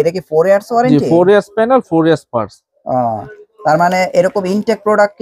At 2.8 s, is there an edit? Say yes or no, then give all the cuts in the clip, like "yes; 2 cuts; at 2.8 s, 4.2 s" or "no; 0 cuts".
no; 0 cuts